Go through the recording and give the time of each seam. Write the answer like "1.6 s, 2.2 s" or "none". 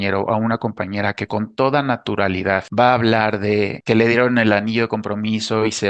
2.7 s, 3.8 s